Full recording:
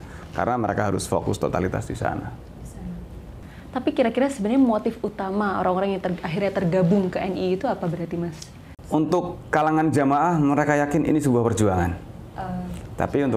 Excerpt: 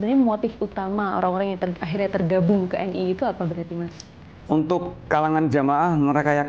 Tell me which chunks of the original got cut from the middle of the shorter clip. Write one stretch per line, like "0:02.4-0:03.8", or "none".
none

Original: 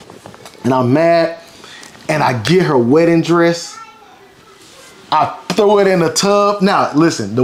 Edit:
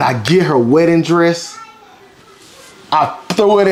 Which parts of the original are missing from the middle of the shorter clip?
none

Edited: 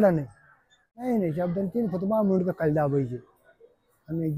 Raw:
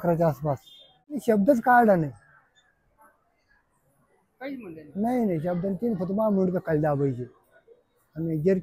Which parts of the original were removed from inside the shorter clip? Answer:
0:02.9-0:05.1

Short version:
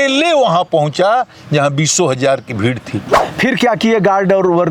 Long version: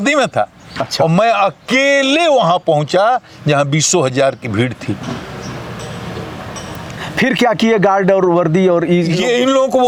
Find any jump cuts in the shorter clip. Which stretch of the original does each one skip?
0:05.1-0:07.0

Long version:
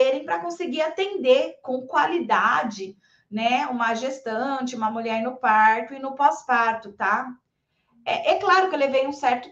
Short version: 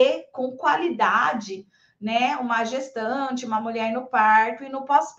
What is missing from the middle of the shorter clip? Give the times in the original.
none

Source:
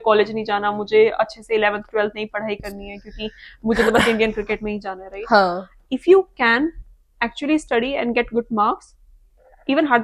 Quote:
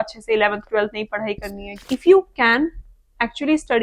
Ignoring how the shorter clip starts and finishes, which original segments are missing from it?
0:02.9-0:05.7

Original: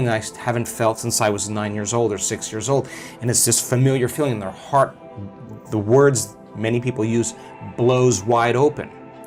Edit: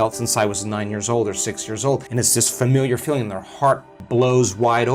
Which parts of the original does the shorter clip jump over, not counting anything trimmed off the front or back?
0:02.9-0:03.2
0:05.0-0:07.6

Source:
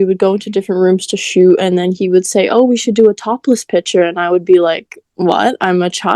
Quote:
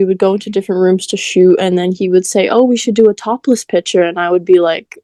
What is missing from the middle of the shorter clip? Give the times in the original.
none

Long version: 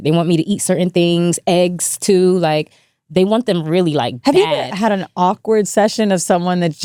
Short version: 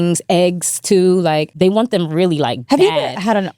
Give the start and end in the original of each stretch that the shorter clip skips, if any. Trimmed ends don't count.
0:02.7-0:03.0

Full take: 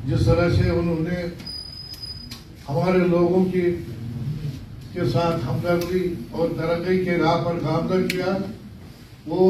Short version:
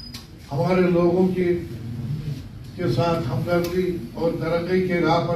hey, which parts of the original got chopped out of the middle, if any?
none

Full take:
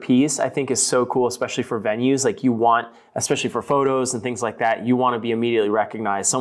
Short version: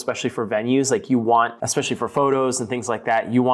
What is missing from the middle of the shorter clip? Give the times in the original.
0:02.9-0:03.1

